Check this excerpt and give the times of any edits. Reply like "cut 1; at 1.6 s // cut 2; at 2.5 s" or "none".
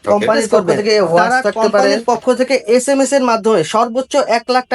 cut 1; at 2.0 s